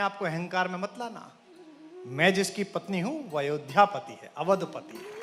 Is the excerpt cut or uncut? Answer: uncut